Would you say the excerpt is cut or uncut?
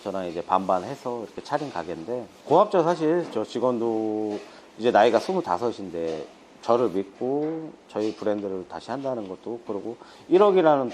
uncut